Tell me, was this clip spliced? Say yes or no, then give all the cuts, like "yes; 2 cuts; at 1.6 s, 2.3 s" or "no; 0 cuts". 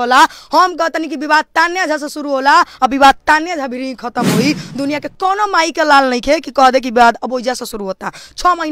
no; 0 cuts